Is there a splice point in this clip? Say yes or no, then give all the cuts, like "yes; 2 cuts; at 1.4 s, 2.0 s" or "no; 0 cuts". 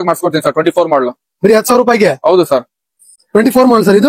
no; 0 cuts